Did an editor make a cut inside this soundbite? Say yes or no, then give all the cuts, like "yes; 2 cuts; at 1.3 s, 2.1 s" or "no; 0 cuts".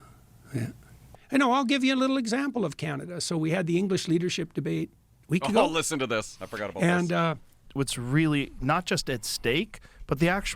yes; 2 cuts; at 1.2 s, 7.7 s